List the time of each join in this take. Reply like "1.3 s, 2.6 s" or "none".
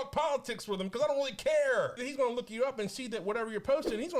2.0 s